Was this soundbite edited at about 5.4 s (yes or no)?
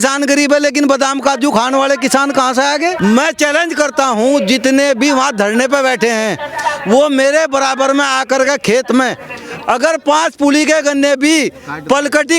no